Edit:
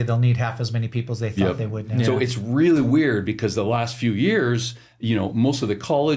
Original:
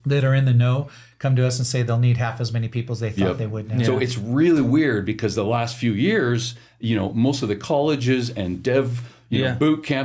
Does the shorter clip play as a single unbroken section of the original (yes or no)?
yes